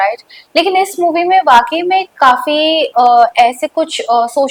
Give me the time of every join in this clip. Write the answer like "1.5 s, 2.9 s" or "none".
none